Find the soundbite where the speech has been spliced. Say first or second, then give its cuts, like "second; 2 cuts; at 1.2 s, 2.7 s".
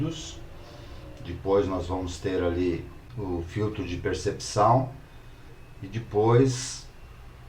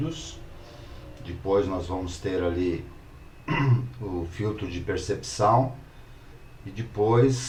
first; 1 cut; at 3.1 s